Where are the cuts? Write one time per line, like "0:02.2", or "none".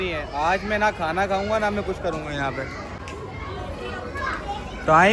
none